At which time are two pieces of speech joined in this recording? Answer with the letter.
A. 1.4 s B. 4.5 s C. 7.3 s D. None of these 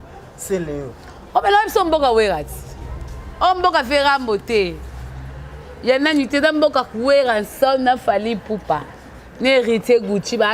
D